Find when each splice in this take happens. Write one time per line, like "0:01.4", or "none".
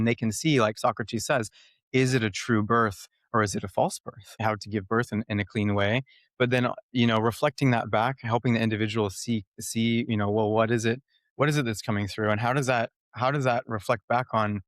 0:04.4